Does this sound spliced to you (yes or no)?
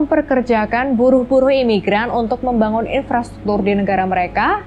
no